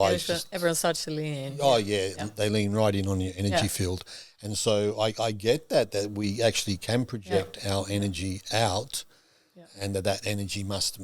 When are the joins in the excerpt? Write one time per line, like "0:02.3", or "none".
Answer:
none